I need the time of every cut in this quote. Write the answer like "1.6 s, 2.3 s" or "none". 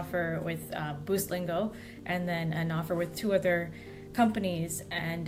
none